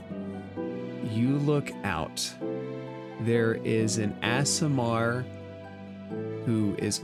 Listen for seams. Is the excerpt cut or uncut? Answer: uncut